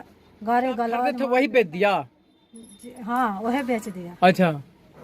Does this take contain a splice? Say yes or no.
yes